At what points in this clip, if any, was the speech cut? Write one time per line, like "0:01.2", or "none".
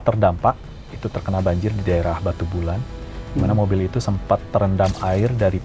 none